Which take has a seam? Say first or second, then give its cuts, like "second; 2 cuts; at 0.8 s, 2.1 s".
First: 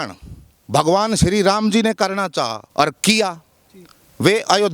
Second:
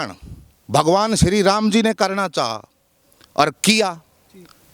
first; 1 cut; at 2.6 s